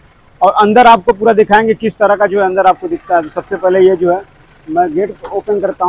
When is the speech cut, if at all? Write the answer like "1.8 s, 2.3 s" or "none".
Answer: none